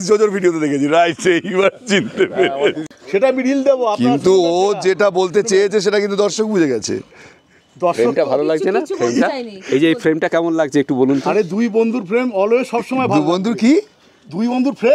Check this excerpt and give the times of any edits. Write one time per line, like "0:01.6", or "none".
0:02.8